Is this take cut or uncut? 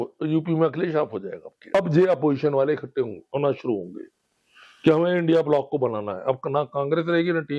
cut